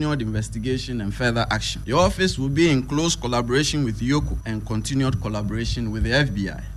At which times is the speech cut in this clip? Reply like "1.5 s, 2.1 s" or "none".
1.7 s, 4.4 s

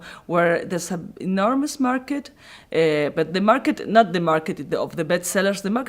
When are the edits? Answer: 4.1 s

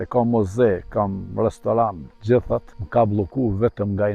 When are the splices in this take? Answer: 2.1 s, 2.8 s

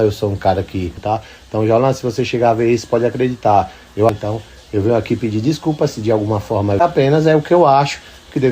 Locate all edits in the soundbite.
0.9 s, 4.1 s, 6.8 s

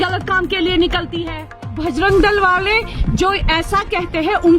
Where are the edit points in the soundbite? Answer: 1.8 s

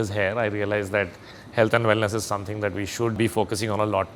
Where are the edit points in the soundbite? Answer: 3.1 s

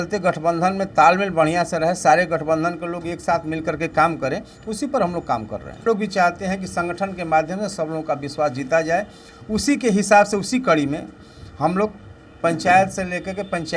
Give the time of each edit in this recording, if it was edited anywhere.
5.9 s

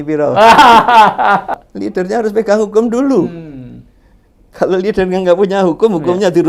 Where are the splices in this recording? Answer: 1.5 s

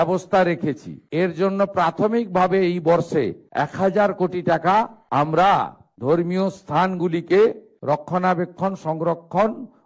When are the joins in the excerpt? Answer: 1.0 s

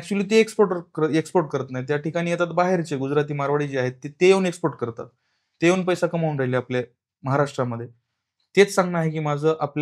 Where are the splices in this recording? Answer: none

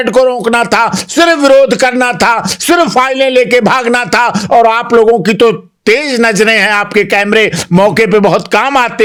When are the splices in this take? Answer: none

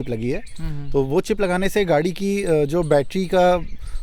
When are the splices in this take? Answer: none

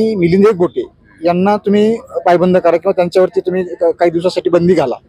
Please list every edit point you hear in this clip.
none

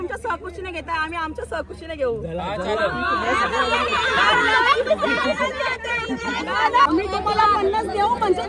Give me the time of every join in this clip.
6.9 s

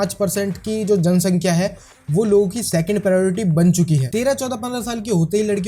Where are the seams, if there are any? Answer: 4.1 s

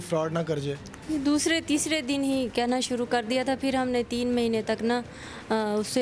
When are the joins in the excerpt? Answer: 0.9 s

